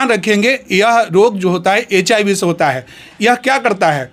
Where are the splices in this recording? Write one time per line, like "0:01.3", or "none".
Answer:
none